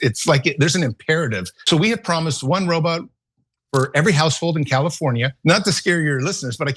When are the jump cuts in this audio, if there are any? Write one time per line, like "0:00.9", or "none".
0:01.5
0:05.3